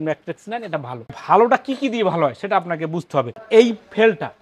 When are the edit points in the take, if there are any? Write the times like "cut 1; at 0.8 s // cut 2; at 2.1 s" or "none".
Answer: cut 1; at 1.2 s // cut 2; at 3.4 s